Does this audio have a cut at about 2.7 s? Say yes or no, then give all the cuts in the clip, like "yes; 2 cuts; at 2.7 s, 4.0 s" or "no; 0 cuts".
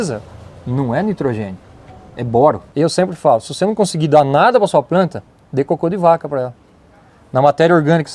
yes; 1 cut; at 2.7 s